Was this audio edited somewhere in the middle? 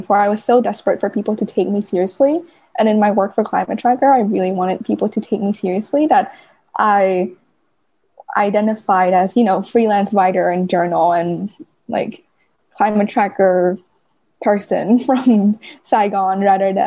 no; 0 cuts

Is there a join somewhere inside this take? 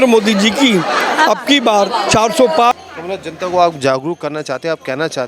yes; 1 cut; at 2.7 s

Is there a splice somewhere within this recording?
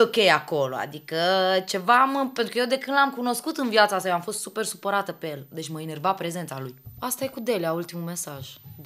yes; 1 cut; at 6.9 s

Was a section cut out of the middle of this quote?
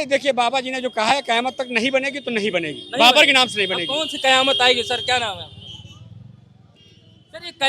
no; 0 cuts

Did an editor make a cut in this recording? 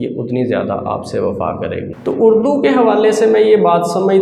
yes; 1 cut; at 1.9 s

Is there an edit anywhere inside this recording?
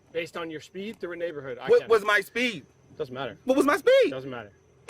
no; 0 cuts

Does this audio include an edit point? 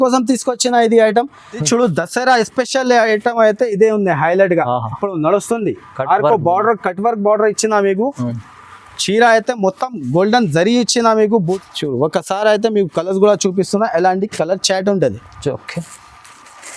yes; 2 cuts; at 1.6 s, 11.6 s

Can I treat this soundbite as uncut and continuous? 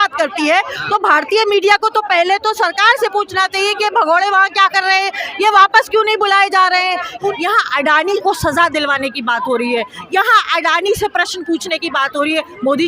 no; 1 cut; at 7.3 s

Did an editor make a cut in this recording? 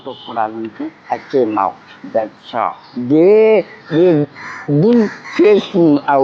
yes; 4 cuts; at 1.0 s, 2.9 s, 3.8 s, 5.2 s

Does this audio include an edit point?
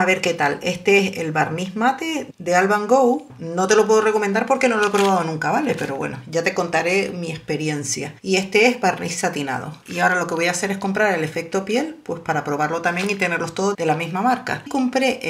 no; 0 cuts

